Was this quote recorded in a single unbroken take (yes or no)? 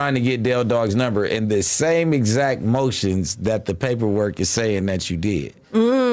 yes